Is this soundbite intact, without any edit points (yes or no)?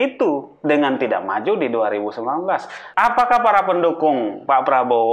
no